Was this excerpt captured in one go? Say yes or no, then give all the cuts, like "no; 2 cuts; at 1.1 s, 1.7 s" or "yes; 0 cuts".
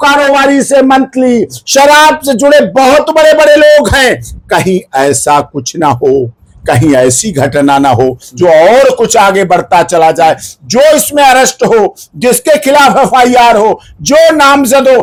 yes; 0 cuts